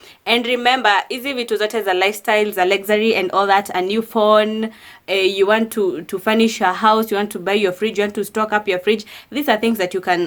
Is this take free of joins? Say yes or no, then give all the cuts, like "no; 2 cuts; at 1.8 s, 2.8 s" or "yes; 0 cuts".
yes; 0 cuts